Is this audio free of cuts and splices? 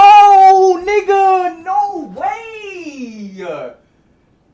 yes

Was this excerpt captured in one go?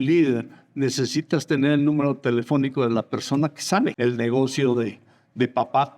no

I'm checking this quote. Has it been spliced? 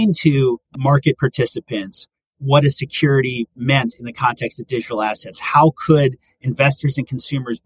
no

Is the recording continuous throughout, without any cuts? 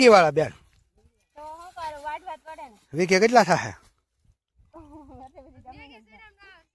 yes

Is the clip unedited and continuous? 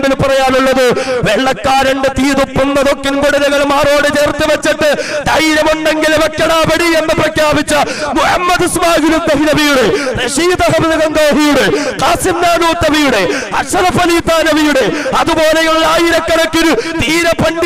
yes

